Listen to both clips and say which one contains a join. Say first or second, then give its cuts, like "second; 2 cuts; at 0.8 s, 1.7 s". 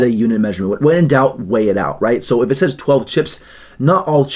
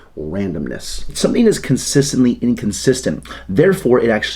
second; 1 cut; at 1.1 s